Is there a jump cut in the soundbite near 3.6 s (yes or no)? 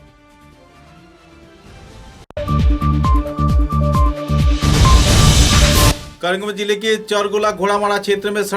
no